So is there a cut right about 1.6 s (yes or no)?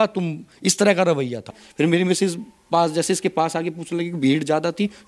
yes